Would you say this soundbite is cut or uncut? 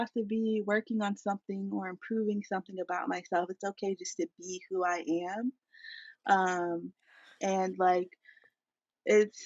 uncut